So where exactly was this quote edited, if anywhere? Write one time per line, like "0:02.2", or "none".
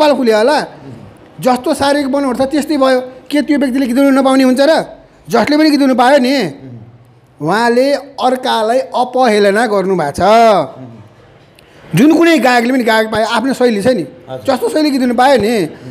none